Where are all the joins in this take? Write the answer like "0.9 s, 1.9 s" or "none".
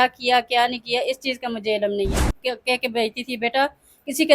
2.3 s